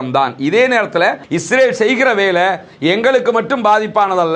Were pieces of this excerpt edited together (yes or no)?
yes